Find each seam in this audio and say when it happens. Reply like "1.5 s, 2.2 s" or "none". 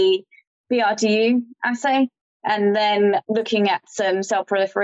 3.2 s